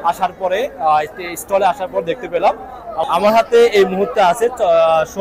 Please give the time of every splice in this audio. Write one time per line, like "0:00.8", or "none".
0:03.0